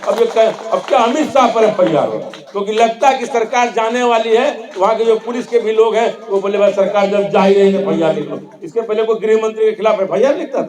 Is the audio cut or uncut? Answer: uncut